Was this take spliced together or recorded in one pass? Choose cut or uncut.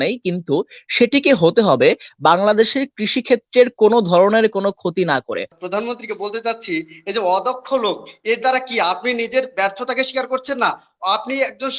cut